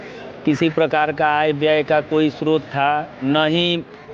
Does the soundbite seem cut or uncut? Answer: uncut